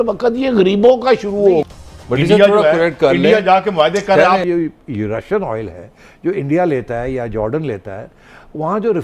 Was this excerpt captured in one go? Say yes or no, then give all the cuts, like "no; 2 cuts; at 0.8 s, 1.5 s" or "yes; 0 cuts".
no; 2 cuts; at 1.7 s, 4.4 s